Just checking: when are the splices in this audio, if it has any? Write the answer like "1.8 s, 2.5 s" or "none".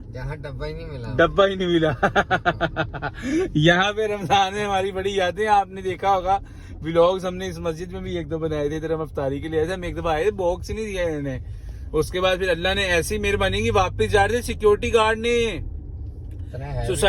none